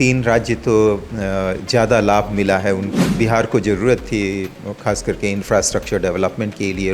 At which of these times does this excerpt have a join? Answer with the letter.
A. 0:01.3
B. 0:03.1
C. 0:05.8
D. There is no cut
B